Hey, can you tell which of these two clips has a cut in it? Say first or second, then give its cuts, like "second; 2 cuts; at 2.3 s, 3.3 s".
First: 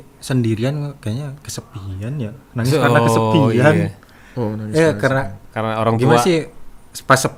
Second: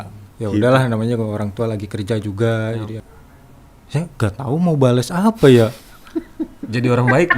second; 1 cut; at 3.0 s